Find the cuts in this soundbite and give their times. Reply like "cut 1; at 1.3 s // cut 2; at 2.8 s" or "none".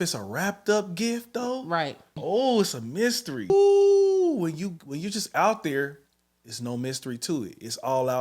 cut 1; at 2.1 s // cut 2; at 3.5 s